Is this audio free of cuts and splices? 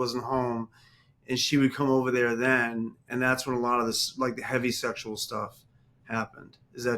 yes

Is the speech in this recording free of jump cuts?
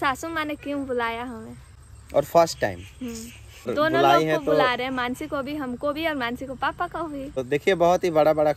no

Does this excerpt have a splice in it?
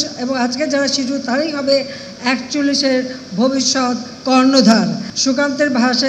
yes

